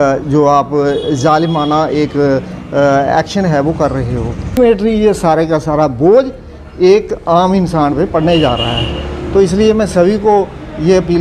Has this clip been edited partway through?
yes; 1 cut; at 4.6 s

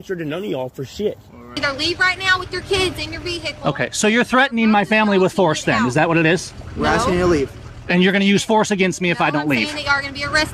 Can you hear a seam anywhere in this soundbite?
yes; 1 cut; at 1.6 s

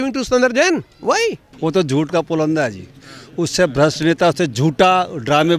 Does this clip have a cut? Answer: yes; 1 cut; at 1.5 s

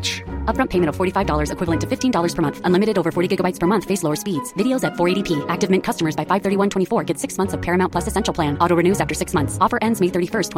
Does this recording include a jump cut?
no; 0 cuts

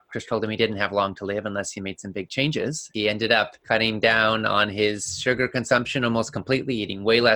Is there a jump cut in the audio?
yes; 2 cuts; at 2.8 s, 3.6 s

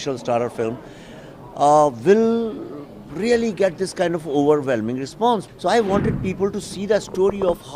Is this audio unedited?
no; 1 cut; at 5.5 s

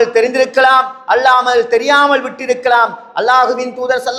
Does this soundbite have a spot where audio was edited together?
no; 0 cuts

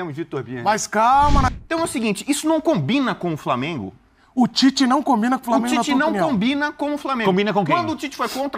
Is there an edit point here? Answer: yes; 1 cut; at 1.5 s

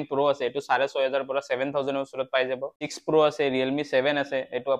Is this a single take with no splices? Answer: no; 1 cut; at 2.9 s

